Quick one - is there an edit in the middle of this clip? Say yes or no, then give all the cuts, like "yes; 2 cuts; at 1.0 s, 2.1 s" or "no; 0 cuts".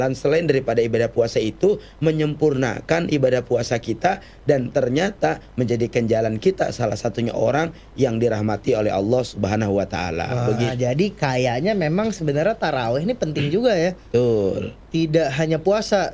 yes; 1 cut; at 10.7 s